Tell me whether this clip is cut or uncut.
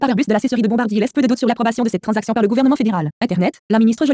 cut